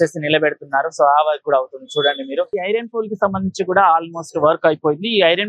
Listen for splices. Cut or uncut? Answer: cut